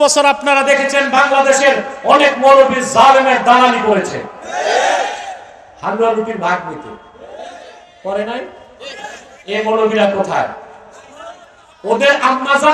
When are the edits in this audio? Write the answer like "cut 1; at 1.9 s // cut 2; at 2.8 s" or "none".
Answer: none